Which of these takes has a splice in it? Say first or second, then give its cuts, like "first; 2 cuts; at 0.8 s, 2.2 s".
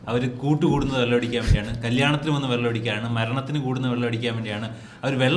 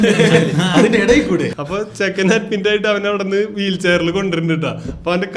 second; 1 cut; at 1.5 s